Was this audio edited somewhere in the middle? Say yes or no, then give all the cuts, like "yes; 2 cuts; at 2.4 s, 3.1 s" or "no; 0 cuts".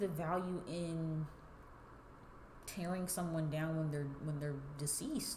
no; 0 cuts